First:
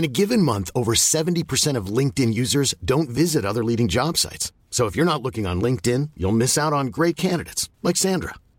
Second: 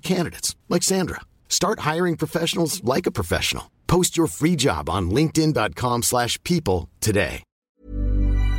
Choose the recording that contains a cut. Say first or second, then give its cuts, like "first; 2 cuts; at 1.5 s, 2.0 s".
second; 1 cut; at 7.5 s